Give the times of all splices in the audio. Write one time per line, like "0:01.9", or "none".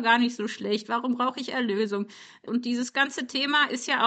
0:02.3